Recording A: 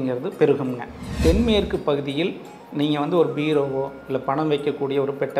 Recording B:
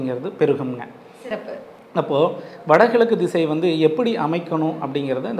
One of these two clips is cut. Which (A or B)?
A